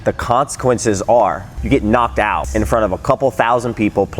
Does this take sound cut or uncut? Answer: cut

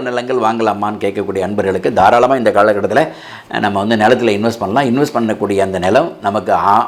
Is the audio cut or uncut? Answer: uncut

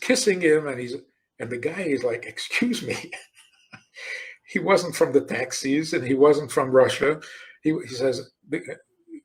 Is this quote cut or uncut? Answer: uncut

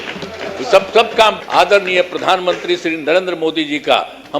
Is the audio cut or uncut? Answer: cut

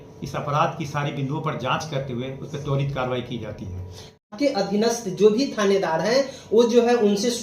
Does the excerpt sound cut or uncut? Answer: cut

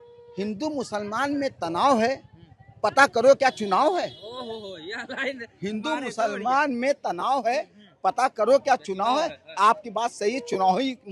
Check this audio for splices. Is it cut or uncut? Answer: uncut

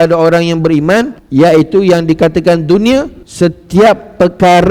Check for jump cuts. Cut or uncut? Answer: cut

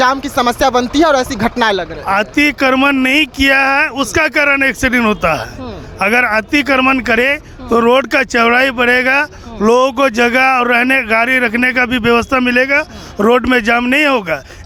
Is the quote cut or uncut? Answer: uncut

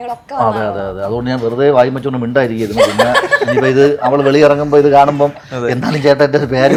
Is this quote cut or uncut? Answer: uncut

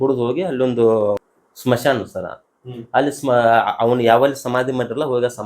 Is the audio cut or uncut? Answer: cut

